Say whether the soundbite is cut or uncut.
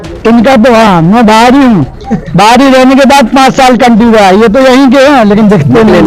uncut